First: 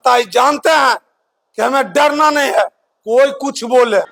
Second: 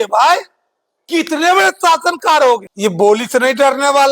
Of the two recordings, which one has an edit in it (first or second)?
second